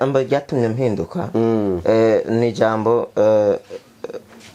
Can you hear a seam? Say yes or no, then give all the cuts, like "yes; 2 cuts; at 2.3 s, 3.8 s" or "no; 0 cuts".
no; 0 cuts